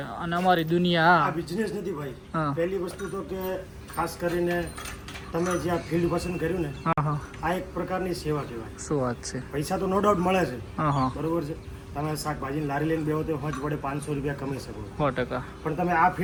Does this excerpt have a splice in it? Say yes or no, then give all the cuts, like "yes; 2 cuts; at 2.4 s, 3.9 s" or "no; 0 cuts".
no; 0 cuts